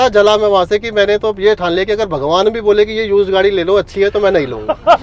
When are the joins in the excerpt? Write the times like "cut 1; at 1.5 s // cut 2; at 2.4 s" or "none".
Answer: none